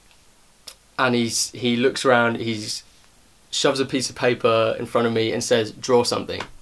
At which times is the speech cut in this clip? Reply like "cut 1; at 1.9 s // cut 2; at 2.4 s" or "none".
none